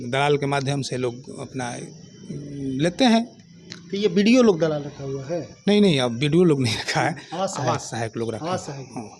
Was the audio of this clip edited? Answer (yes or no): no